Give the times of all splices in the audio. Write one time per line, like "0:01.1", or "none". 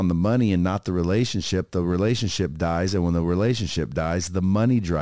none